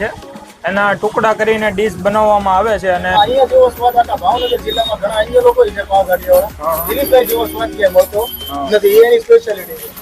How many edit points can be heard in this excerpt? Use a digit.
1